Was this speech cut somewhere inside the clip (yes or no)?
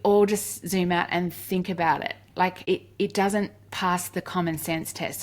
yes